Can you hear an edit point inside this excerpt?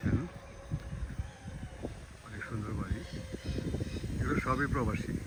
no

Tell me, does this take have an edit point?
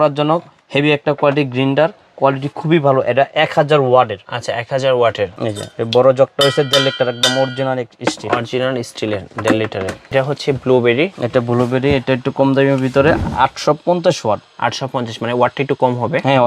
yes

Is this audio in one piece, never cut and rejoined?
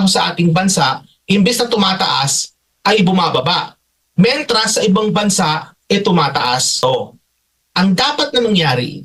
no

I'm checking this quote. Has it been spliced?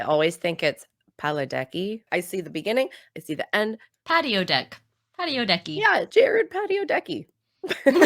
yes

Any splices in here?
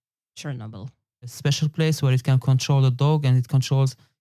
yes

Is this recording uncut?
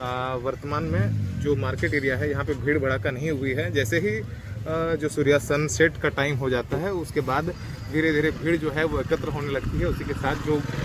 yes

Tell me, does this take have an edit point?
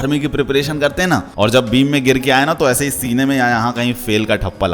yes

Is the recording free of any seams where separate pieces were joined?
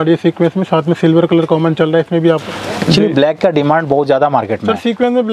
no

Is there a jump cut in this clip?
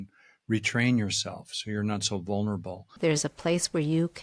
yes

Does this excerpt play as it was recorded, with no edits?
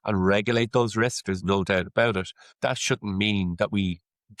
no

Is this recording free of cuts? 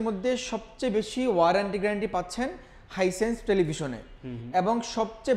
yes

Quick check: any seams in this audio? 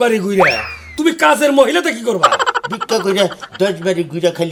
no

